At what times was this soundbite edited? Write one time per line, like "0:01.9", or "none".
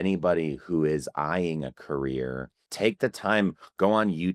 0:02.7